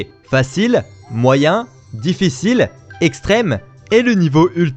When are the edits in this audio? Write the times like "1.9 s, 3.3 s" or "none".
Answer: none

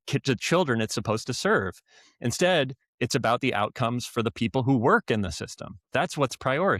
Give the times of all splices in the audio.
none

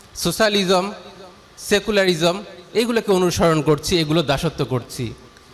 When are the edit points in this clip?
none

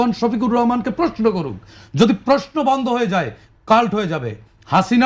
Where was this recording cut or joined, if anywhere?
none

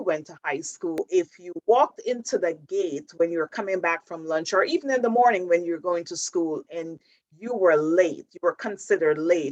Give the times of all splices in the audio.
1.0 s

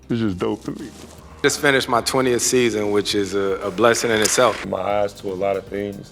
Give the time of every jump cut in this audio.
1.4 s, 4.6 s

